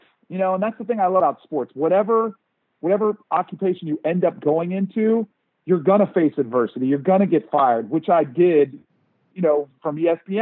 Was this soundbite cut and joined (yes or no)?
yes